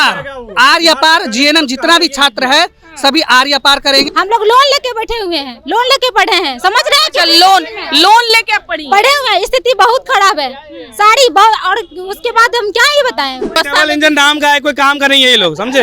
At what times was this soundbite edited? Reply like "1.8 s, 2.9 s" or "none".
4.1 s, 13.6 s